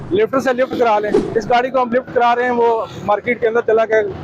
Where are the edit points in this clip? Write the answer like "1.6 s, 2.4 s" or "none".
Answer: 1.2 s